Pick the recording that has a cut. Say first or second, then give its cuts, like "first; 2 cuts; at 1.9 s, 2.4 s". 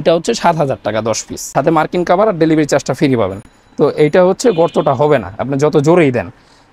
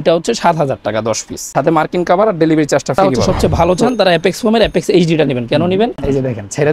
second; 2 cuts; at 3.0 s, 5.9 s